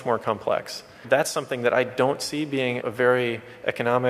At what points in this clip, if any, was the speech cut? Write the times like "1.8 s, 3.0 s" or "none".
1.0 s, 2.8 s